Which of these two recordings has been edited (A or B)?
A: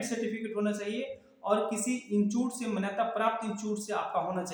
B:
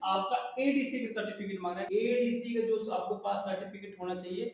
B